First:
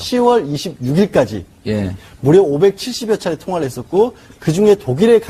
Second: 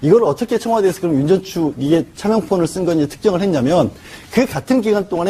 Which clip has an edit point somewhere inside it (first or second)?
second